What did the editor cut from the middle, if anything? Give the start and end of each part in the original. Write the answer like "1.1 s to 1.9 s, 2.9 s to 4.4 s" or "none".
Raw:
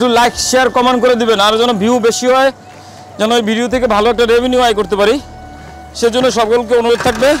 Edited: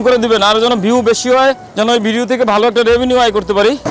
2.6 s to 3.1 s